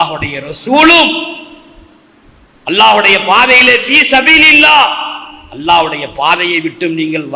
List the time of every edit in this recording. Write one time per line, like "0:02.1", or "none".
none